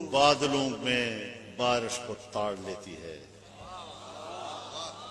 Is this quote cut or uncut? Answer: uncut